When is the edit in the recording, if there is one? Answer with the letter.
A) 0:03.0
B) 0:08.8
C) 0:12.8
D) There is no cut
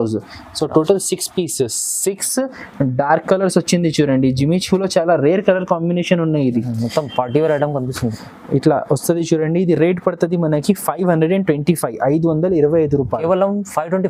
D